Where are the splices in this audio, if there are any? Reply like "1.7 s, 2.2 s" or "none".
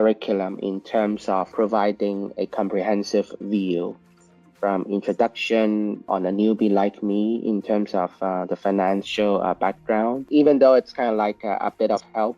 1.5 s, 6.0 s, 10.2 s